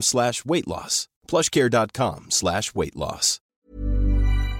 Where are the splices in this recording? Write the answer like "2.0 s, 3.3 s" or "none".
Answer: 3.6 s